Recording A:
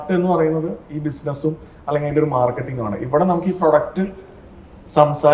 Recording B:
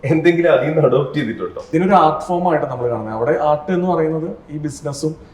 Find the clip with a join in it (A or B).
B